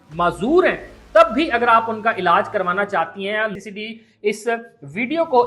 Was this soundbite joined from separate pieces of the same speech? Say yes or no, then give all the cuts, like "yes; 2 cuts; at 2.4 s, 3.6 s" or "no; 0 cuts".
yes; 1 cut; at 3.5 s